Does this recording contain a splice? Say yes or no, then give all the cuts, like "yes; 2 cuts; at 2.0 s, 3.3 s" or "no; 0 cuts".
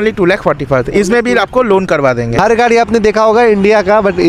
yes; 1 cut; at 2.3 s